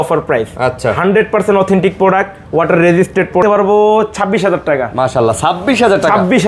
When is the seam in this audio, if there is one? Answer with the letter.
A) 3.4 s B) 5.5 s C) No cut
A